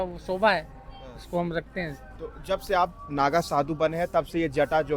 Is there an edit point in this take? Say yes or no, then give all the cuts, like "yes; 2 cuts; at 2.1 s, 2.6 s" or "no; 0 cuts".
no; 0 cuts